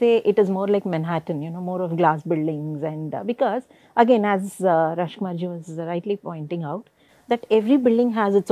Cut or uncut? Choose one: uncut